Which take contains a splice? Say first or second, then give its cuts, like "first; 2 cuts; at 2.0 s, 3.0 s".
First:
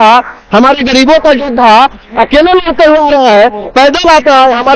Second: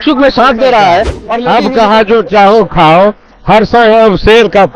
second; 1 cut; at 1.2 s